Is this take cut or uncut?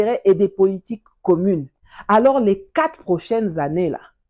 cut